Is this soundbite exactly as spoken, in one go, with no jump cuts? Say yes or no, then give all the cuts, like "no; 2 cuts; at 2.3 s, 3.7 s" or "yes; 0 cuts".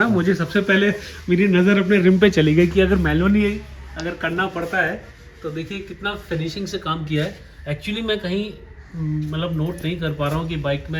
yes; 0 cuts